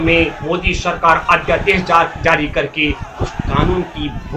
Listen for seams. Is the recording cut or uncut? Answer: uncut